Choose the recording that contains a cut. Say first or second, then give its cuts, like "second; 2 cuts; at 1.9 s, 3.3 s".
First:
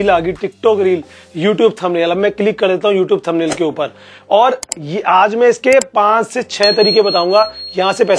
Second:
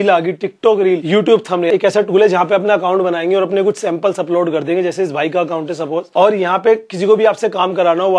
second; 2 cuts; at 1.6 s, 6.1 s